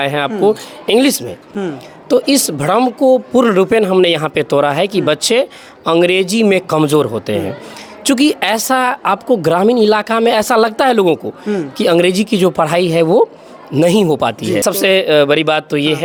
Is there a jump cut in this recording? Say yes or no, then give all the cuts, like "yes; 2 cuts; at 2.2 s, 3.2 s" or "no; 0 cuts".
no; 0 cuts